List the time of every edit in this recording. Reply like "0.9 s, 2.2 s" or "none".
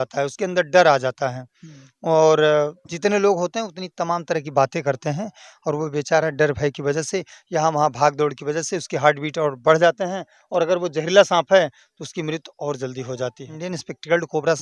13.5 s

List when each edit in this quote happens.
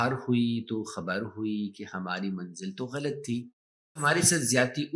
4.0 s

